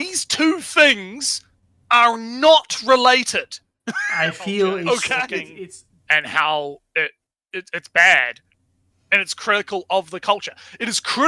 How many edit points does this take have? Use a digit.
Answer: 1